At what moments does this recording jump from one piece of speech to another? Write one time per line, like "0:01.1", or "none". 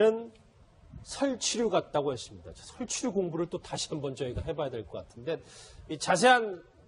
none

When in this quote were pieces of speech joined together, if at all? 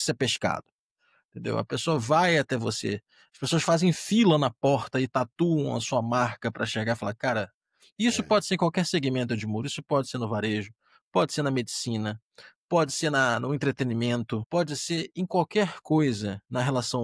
0:14.4

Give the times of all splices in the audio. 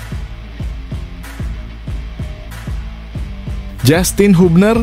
none

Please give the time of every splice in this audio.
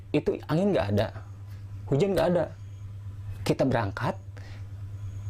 none

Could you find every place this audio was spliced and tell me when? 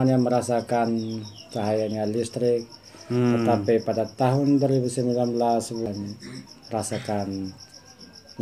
0:05.9

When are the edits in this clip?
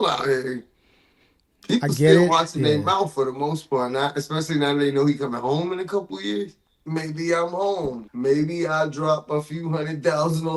0:06.7
0:08.1

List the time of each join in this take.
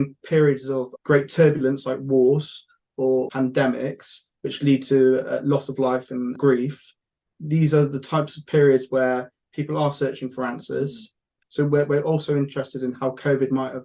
0:00.9
0:03.3
0:06.4
0:11.4

